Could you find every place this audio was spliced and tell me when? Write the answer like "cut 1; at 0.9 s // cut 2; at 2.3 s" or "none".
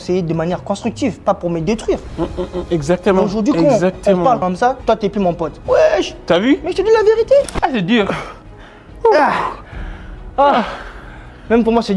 cut 1; at 7.5 s